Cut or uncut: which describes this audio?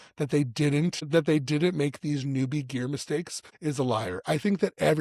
cut